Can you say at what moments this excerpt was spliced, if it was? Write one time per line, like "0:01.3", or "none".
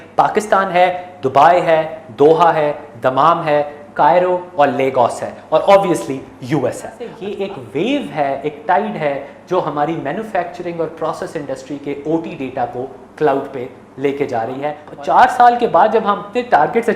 0:07.2
0:14.8